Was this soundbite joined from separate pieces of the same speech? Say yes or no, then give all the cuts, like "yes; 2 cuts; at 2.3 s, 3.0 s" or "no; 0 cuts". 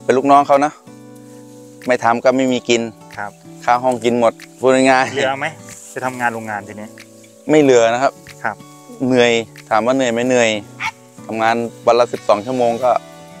no; 0 cuts